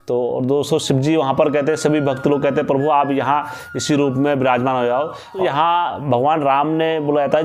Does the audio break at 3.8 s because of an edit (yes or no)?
no